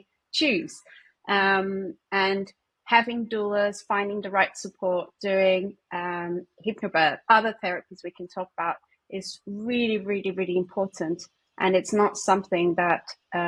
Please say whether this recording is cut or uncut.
uncut